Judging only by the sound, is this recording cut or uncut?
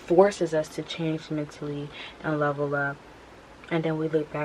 uncut